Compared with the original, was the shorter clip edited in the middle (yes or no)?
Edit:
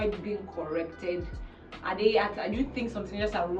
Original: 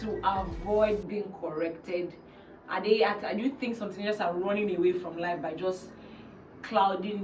no